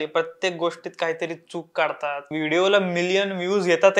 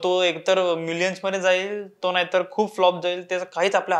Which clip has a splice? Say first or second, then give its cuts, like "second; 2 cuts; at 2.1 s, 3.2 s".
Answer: first; 1 cut; at 2.3 s